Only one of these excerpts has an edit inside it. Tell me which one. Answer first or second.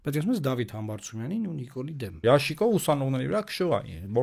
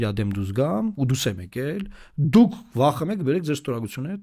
first